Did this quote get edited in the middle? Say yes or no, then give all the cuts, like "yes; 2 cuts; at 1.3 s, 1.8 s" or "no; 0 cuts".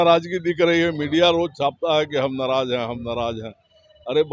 no; 0 cuts